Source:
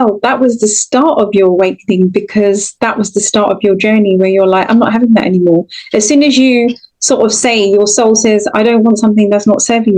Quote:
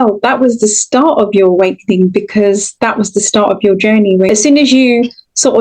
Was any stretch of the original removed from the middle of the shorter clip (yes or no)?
yes